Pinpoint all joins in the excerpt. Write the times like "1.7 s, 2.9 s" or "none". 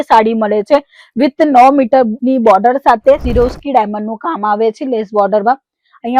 3.2 s